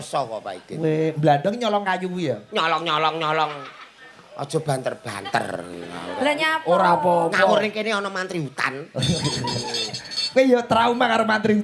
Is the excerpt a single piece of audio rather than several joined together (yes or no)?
yes